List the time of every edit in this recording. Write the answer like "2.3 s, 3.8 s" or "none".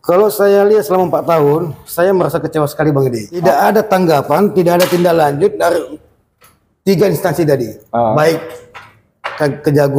3.4 s